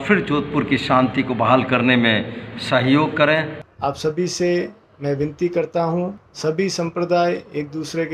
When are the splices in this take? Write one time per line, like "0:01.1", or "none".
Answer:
0:03.6
0:06.2